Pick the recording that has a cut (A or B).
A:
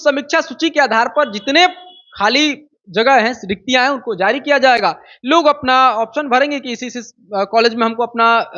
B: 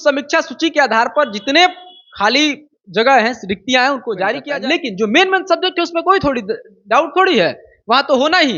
B